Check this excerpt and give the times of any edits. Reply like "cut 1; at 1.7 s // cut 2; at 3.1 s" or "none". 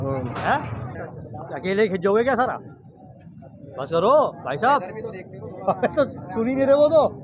cut 1; at 1.0 s